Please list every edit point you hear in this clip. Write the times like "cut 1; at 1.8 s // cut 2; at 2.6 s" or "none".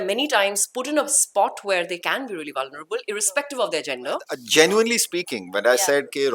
cut 1; at 4.4 s